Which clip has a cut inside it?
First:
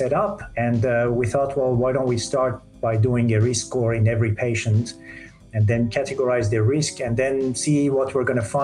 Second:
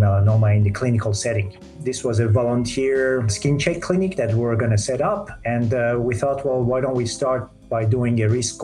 second; 2 cuts; at 1.7 s, 3.3 s

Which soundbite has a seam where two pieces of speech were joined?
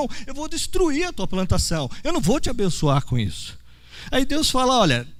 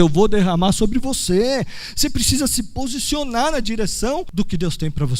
second; 1 cut; at 4.3 s

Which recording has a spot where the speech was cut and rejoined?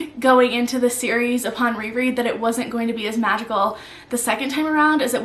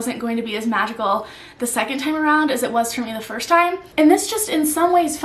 second; 1 cut; at 3.8 s

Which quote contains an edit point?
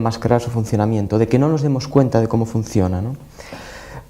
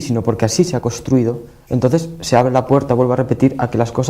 second; 1 cut; at 2.5 s

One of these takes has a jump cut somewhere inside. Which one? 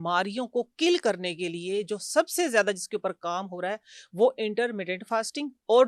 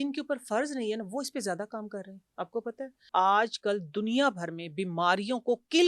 second; 1 cut; at 3.0 s

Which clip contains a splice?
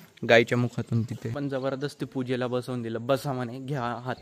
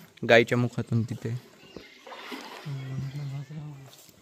first; 1 cut; at 1.3 s

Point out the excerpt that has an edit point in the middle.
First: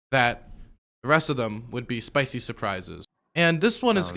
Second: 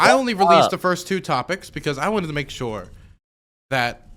first; 1 cut; at 3.0 s

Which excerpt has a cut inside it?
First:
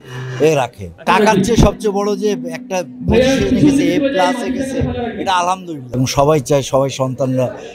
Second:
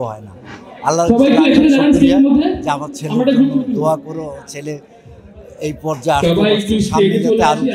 first; 2 cuts; at 1.0 s, 5.8 s

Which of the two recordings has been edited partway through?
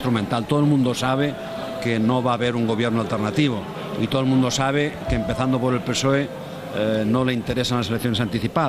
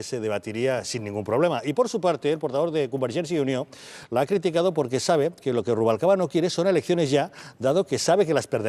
second; 1 cut; at 5.8 s

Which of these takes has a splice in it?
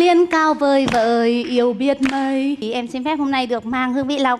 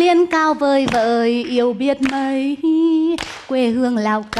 first; 1 cut; at 2.6 s

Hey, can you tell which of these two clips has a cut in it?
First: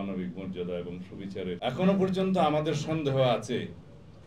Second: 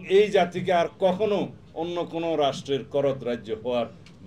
first; 1 cut; at 1.6 s

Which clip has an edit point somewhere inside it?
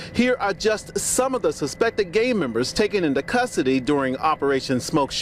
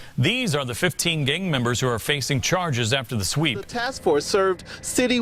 second; 1 cut; at 3.7 s

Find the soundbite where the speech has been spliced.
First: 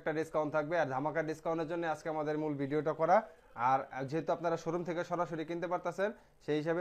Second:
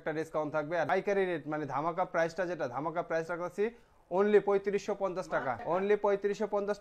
second; 2 cuts; at 0.9 s, 5.6 s

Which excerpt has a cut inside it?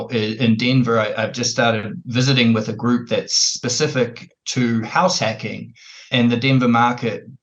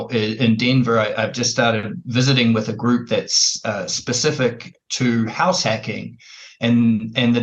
first; 2 cuts; at 3.5 s, 6.0 s

